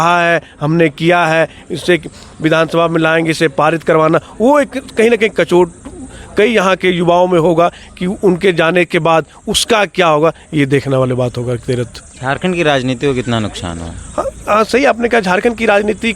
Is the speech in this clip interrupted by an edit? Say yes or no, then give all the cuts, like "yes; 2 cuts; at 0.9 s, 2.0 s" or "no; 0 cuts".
no; 0 cuts